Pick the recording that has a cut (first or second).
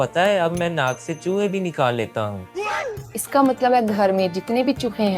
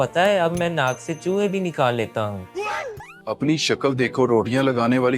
second